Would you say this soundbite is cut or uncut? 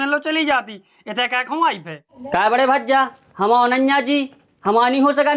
cut